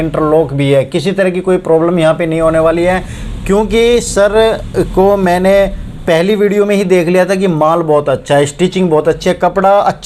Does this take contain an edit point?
no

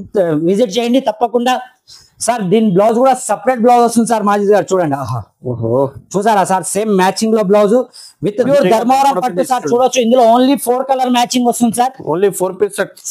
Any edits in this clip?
yes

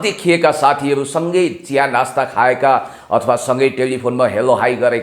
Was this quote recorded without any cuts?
yes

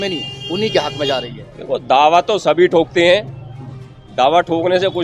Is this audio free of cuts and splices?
yes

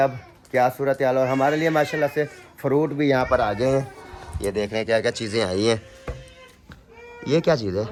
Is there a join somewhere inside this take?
no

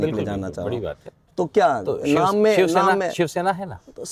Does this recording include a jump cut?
no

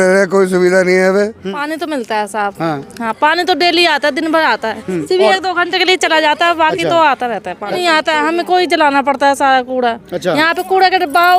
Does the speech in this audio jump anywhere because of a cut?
yes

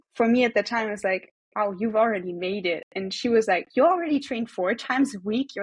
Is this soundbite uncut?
yes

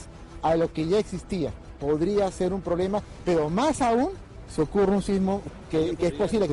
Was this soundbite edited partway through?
yes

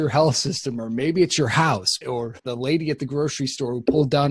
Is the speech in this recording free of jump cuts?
no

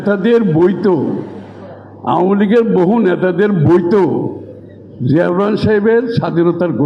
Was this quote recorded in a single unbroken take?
yes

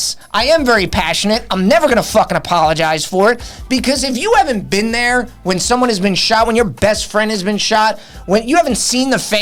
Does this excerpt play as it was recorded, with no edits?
yes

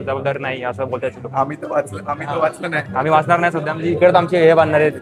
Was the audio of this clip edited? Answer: no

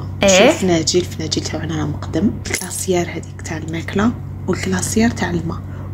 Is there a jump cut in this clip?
yes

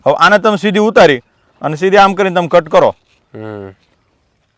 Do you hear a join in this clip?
no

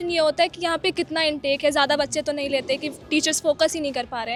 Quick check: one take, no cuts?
yes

